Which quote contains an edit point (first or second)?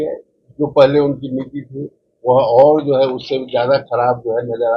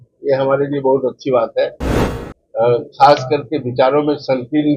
second